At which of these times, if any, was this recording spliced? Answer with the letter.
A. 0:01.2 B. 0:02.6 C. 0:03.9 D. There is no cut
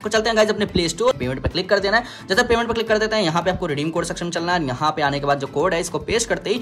A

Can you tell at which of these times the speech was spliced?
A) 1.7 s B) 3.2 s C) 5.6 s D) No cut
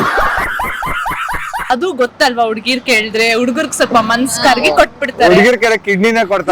A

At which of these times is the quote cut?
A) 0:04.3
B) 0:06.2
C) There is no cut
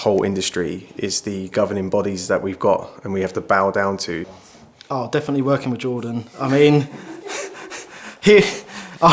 A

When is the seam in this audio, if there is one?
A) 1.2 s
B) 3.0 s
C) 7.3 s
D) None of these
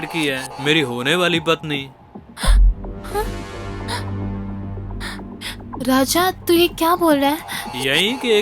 D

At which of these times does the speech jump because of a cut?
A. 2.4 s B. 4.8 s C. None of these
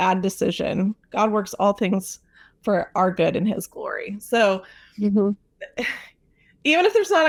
C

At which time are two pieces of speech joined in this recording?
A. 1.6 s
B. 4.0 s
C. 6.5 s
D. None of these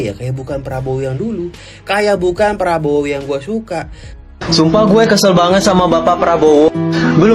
B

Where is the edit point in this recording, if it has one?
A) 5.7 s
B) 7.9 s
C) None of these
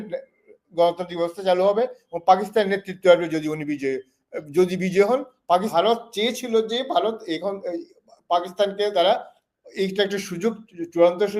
A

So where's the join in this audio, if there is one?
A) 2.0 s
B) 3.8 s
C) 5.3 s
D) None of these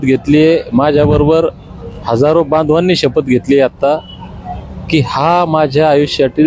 D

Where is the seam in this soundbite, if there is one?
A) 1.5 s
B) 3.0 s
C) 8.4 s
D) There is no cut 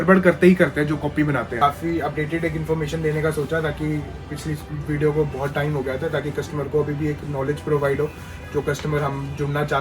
A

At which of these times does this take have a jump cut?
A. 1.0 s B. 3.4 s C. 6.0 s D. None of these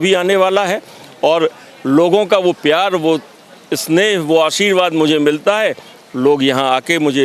D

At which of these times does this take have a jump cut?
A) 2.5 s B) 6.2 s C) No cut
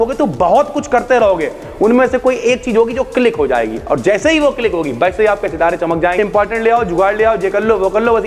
B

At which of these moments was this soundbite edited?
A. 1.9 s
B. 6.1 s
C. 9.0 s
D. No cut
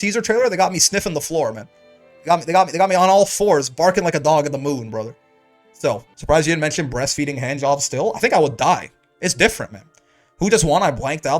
B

